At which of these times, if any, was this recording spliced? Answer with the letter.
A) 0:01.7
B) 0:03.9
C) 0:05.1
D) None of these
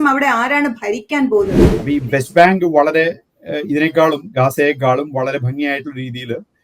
A